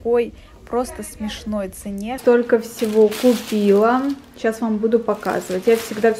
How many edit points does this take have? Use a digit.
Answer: 1